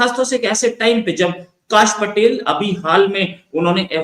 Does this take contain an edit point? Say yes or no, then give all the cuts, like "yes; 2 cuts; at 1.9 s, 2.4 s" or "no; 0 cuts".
no; 0 cuts